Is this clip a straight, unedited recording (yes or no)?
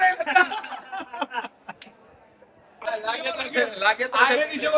no